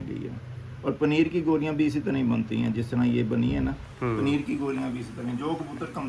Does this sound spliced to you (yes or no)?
no